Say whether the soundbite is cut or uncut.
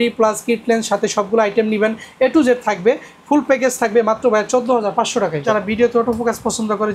cut